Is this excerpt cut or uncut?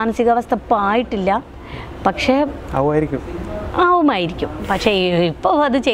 uncut